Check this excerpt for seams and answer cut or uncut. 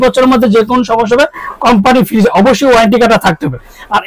uncut